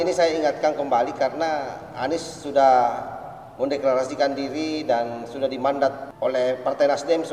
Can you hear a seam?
yes; 1 cut; at 6.1 s

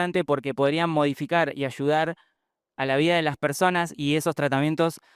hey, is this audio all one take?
no; 1 cut; at 3.9 s

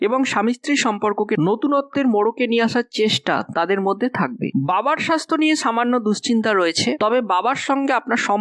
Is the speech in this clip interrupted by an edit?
yes; 1 cut; at 4.5 s

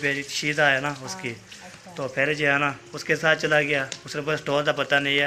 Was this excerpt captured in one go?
yes; 0 cuts

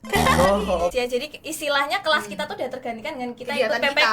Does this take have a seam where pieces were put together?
yes; 1 cut; at 0.9 s

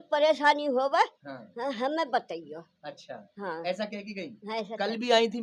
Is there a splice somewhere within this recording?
no; 0 cuts

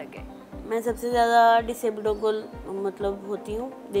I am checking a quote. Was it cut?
no; 0 cuts

